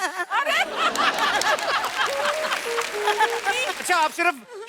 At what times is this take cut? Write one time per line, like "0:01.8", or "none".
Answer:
0:03.7